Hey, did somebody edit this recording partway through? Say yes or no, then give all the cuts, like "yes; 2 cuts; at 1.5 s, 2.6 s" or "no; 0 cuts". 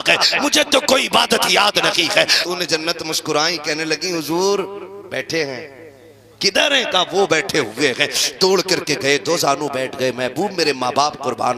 yes; 1 cut; at 2.4 s